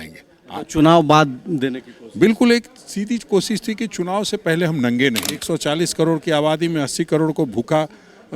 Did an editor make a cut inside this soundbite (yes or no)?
yes